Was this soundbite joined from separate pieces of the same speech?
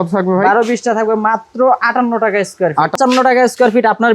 yes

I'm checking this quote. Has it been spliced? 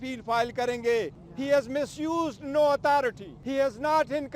yes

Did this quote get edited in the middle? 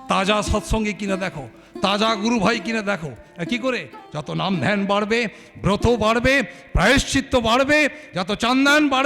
yes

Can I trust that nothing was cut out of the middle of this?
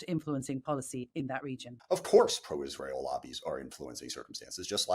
no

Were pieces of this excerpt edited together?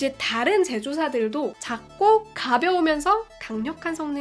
yes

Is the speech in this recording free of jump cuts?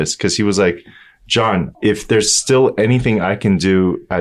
no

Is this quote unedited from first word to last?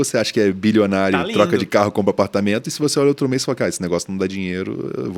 yes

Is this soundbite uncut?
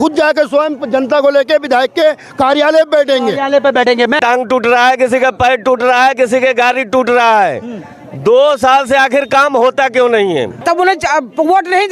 no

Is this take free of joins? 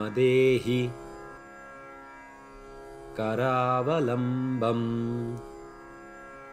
yes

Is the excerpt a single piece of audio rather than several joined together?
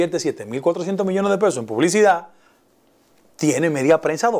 yes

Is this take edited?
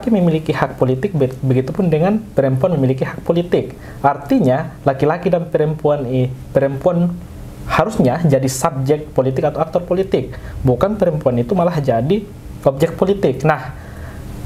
no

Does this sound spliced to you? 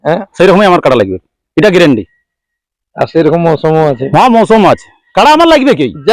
no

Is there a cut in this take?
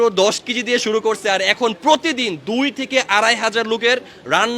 no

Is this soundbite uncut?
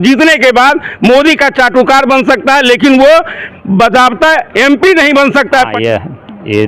no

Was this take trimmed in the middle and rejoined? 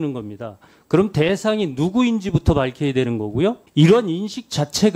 yes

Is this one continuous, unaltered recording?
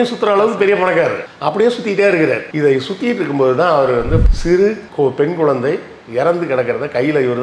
no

